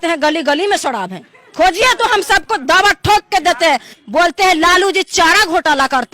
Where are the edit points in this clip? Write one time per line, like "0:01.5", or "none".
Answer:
0:03.9